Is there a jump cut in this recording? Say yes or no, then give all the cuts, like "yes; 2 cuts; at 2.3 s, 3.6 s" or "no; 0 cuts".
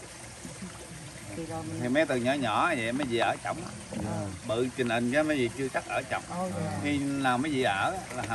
no; 0 cuts